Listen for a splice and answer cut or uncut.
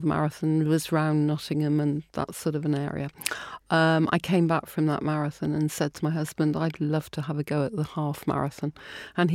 uncut